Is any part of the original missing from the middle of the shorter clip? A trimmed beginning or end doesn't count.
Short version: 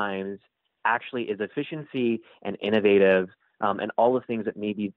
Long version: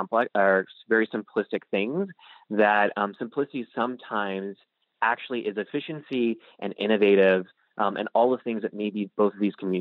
no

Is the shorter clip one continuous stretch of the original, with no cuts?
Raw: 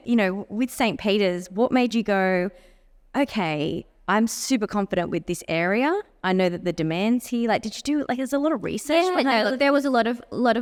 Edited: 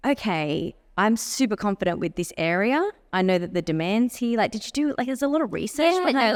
yes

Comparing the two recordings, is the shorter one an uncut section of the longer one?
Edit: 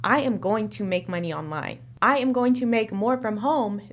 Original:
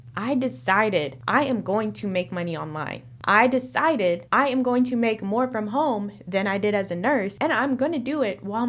no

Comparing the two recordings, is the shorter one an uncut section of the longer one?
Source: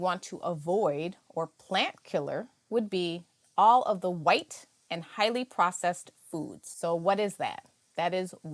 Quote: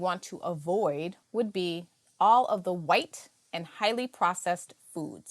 no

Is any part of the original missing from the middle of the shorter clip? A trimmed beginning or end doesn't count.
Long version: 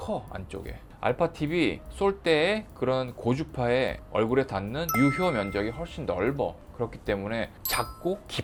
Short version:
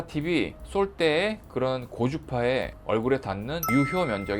no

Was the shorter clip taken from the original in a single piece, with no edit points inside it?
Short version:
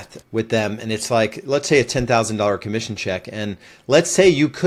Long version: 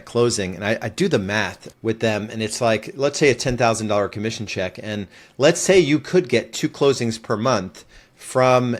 yes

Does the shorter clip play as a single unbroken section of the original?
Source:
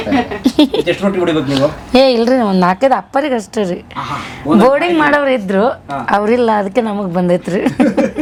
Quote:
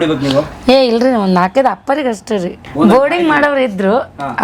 no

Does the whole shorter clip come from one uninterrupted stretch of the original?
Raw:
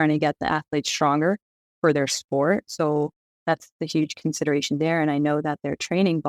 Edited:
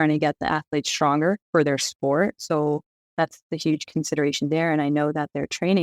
no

